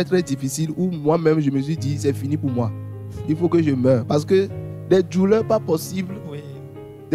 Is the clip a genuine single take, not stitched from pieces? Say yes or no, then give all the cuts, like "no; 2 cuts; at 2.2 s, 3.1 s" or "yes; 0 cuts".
yes; 0 cuts